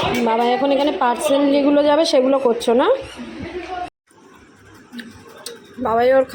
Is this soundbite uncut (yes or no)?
no